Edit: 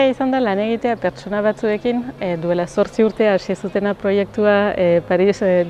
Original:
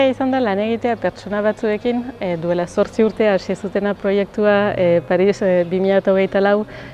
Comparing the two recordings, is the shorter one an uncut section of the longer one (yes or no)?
yes